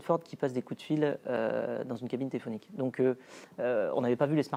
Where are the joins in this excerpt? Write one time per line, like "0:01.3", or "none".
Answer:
none